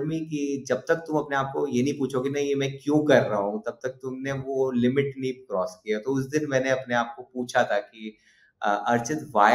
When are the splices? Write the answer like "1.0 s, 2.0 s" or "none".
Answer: none

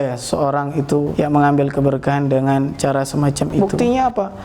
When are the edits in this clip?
1.1 s, 3.5 s

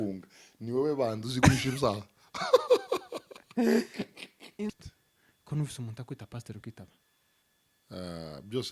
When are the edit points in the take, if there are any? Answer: 4.7 s

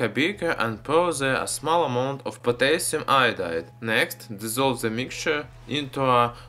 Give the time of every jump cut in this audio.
5.1 s

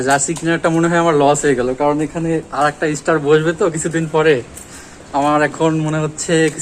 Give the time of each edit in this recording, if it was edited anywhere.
none

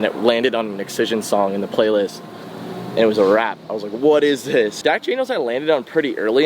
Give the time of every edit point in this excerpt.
4.8 s

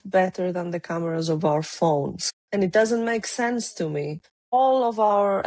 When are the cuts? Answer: 2.4 s, 4.3 s

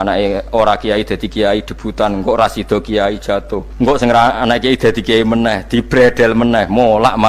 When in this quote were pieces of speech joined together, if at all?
3.6 s

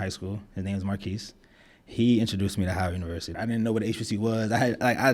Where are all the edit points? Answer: 3.3 s

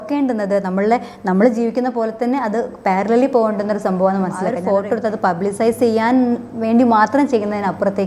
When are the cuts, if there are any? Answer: 4.5 s

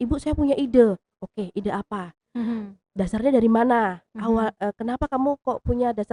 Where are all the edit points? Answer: none

